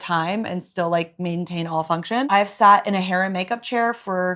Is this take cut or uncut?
cut